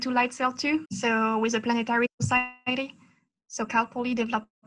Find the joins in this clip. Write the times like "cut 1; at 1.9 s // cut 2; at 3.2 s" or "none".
cut 1; at 0.9 s